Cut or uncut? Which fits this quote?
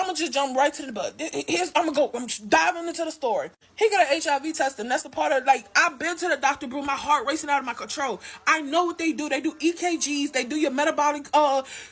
uncut